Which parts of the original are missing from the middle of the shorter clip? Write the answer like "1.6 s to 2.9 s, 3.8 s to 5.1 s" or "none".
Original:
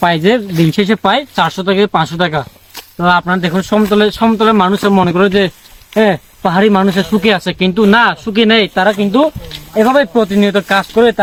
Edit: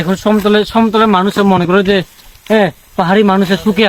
none